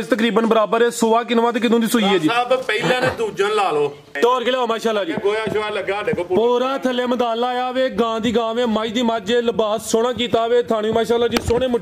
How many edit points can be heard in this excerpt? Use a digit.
1